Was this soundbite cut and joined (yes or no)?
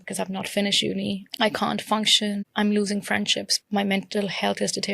yes